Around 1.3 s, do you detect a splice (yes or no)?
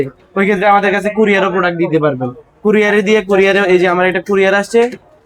no